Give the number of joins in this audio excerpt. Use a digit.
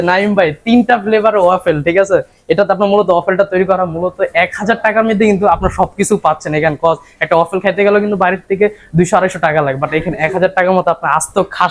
0